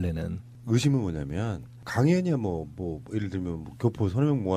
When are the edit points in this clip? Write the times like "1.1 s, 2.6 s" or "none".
none